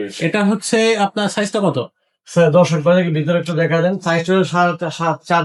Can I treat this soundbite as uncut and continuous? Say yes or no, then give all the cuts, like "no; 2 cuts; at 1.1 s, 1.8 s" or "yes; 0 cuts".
yes; 0 cuts